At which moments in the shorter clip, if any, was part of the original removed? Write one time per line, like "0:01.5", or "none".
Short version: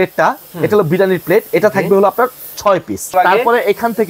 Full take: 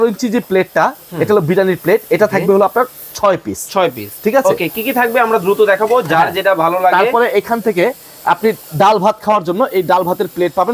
0:03.1